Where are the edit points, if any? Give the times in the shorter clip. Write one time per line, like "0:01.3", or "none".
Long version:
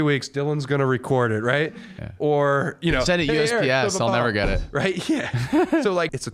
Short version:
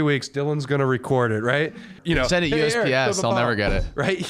0:02.0

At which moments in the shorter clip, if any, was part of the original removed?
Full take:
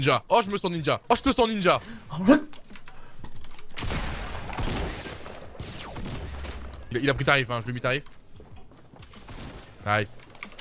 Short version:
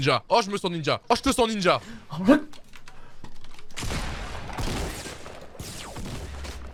none

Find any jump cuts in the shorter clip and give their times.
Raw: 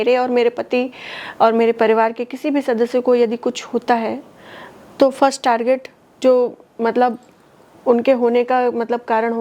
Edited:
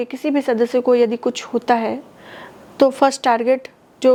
none

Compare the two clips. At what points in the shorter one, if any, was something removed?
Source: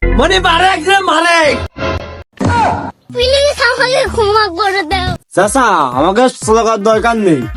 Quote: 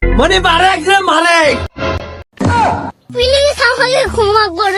none

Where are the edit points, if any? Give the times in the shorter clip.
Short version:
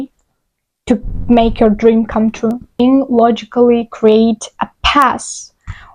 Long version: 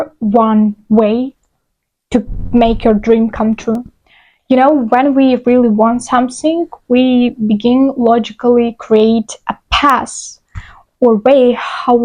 0:02.8

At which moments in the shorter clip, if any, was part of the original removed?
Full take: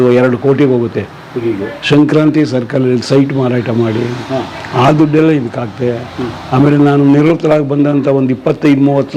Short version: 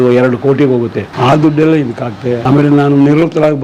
0:01.0
0:02.4

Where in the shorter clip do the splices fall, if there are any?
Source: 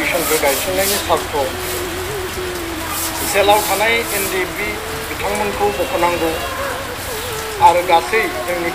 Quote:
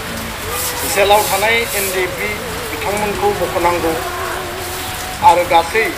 none

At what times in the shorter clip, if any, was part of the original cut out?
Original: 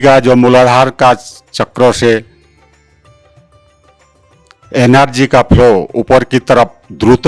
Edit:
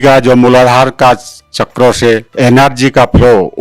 0:02.3

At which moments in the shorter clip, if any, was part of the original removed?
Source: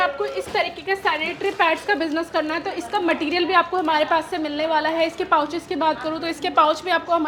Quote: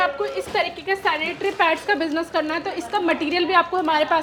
none

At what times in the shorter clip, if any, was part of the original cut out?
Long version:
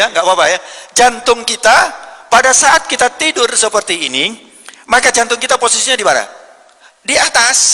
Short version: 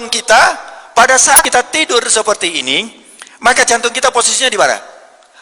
0:01.4

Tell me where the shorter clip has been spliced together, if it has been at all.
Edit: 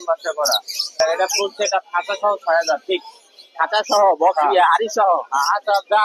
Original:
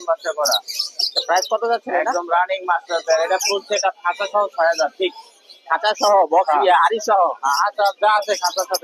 0:00.9

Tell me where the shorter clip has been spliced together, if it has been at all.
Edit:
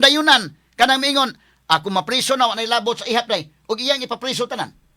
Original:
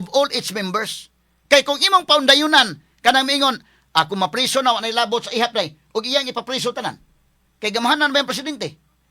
none

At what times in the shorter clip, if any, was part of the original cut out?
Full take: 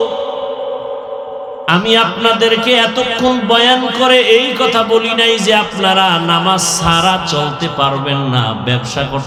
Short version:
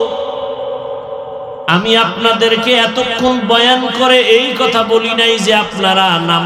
none

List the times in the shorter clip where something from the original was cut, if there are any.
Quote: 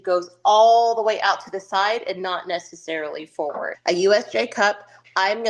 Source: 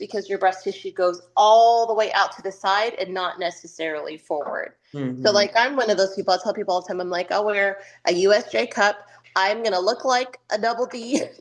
0:03.7

